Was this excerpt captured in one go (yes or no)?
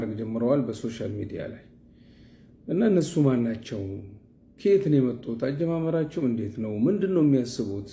yes